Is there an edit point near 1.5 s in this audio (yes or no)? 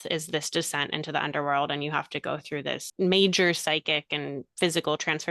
no